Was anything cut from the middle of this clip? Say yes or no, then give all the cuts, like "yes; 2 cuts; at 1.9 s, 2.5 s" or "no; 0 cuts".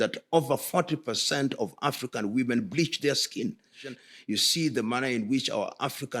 yes; 1 cut; at 3.9 s